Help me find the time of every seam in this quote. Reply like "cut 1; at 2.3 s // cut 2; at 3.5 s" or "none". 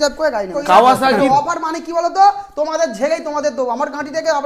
cut 1; at 1.1 s